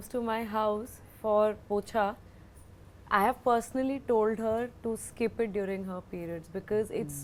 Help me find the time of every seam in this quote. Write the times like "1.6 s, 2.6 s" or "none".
none